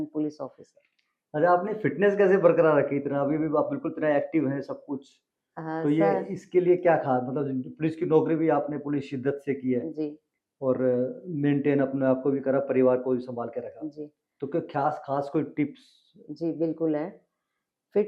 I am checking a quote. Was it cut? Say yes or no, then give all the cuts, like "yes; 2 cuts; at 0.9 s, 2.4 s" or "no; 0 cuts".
no; 0 cuts